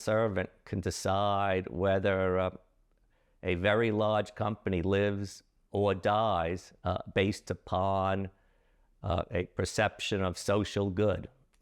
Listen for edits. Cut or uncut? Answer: uncut